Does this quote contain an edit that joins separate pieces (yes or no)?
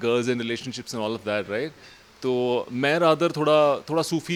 no